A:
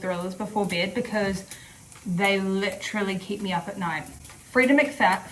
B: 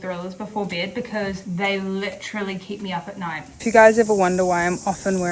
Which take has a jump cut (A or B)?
B